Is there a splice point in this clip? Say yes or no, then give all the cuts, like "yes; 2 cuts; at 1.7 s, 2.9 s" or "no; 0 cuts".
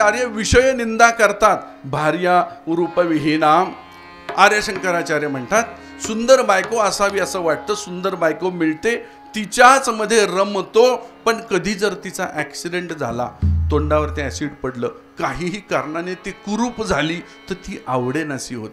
no; 0 cuts